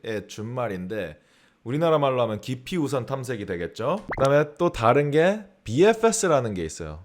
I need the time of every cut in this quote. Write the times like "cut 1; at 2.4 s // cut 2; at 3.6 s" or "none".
cut 1; at 4.1 s